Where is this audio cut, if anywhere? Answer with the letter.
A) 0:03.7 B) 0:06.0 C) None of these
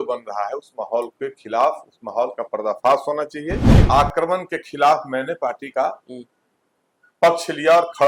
A